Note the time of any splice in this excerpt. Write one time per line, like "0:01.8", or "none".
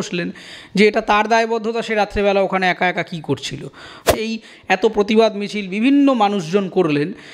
0:04.1

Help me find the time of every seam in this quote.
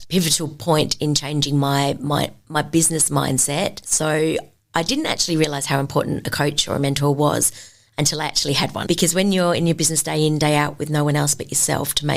none

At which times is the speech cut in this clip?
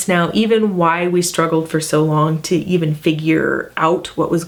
none

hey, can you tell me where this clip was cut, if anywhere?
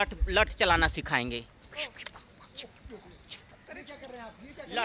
none

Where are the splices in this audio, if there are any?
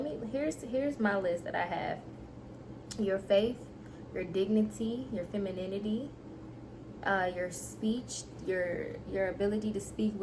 none

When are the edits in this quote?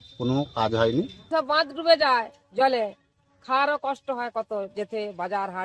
0:01.3

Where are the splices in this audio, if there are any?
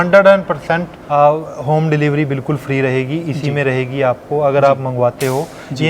0:00.9

